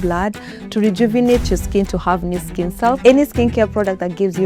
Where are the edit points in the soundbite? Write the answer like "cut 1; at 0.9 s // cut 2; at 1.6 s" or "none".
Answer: cut 1; at 3.0 s